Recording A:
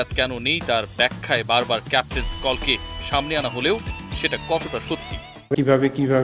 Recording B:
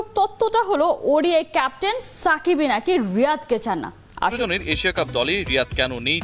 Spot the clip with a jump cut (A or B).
B